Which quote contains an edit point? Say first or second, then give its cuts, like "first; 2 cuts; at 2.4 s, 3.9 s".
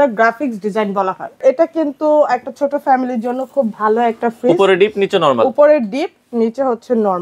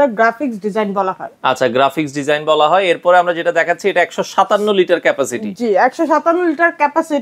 first; 1 cut; at 1.4 s